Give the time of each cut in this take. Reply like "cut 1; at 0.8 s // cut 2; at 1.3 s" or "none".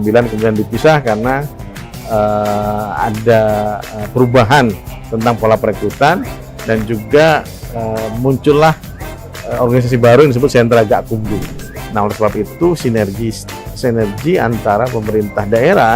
cut 1; at 11.5 s